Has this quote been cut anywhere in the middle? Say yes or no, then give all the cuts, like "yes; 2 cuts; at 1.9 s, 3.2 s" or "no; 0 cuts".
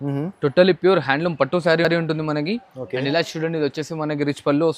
no; 0 cuts